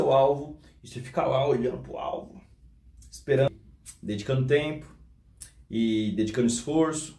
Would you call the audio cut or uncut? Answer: cut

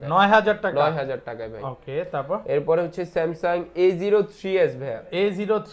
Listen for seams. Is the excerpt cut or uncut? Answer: uncut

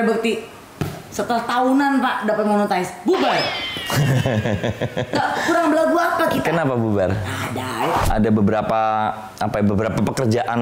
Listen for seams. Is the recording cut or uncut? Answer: cut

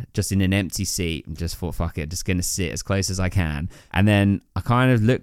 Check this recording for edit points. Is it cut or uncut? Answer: cut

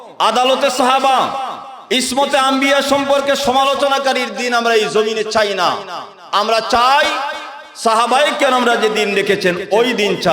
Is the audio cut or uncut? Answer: uncut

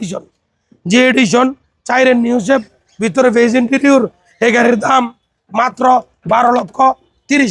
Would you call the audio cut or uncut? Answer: uncut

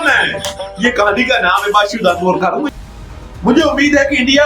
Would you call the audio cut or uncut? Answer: cut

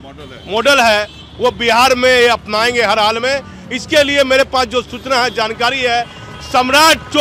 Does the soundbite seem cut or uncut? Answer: uncut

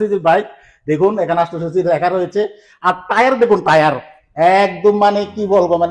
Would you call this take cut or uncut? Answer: uncut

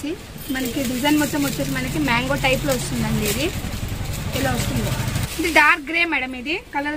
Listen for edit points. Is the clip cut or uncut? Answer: cut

